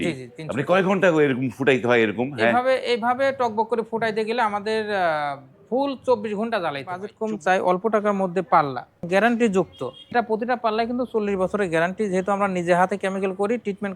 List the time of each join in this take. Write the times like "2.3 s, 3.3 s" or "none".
7.1 s, 9.0 s, 10.1 s